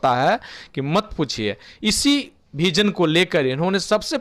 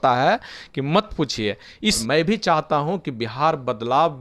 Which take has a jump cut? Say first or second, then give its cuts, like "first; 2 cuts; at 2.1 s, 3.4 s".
second; 1 cut; at 2.0 s